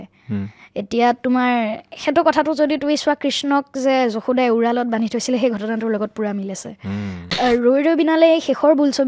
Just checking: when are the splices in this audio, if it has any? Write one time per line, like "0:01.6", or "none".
0:07.4